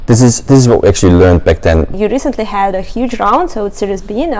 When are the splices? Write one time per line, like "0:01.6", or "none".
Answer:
0:01.9